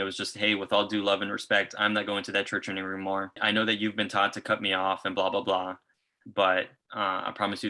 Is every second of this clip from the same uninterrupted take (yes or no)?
no